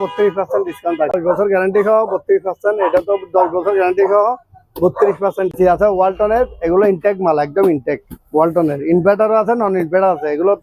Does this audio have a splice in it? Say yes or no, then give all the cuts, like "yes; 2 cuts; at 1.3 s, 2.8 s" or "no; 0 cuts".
yes; 2 cuts; at 1.1 s, 5.5 s